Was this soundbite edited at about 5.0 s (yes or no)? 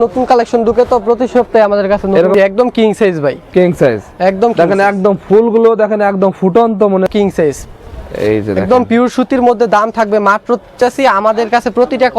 no